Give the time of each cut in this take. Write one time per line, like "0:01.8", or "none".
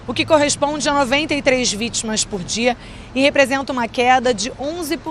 none

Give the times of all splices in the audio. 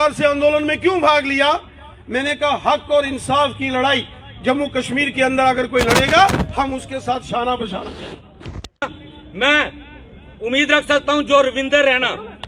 0:09.0

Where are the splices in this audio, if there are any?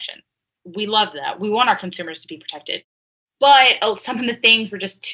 0:02.8

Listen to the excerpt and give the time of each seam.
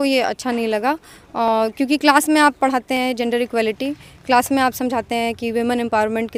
none

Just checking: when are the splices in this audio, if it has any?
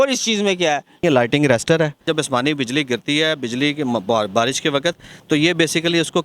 0:01.0
0:02.0

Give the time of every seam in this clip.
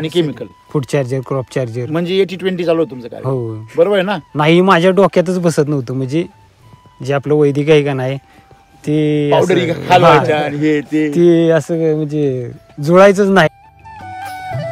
0:13.5

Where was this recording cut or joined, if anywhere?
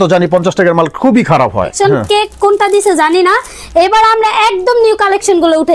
0:01.7

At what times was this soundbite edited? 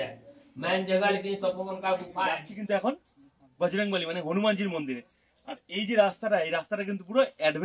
0:02.5

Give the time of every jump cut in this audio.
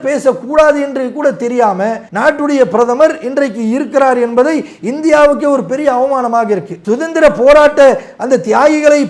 0:02.1
0:06.7

